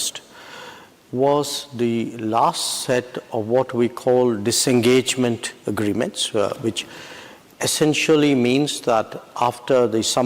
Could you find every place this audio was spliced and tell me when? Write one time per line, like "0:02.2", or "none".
none